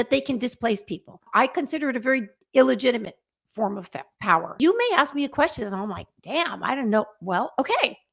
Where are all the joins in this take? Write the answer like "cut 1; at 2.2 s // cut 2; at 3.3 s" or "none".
cut 1; at 1.2 s // cut 2; at 4.5 s